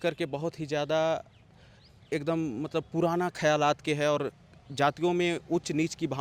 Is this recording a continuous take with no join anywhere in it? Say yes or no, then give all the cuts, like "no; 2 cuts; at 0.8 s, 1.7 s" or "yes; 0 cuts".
yes; 0 cuts